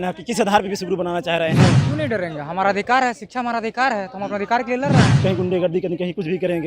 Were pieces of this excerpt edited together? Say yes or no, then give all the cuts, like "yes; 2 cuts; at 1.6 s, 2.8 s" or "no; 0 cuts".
yes; 2 cuts; at 1.8 s, 5.1 s